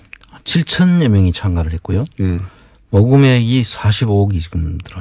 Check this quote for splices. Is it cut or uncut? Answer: uncut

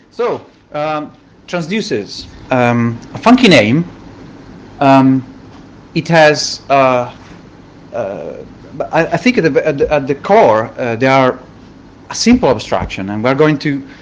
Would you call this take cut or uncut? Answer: uncut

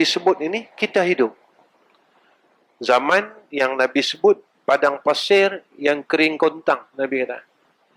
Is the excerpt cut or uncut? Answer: uncut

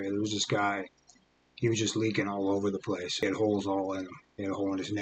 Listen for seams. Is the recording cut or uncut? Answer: cut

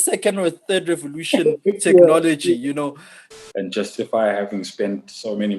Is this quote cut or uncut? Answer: cut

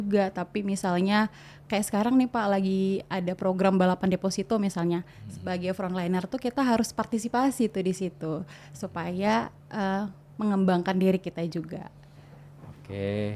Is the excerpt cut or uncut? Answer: uncut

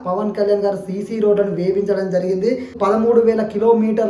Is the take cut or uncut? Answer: cut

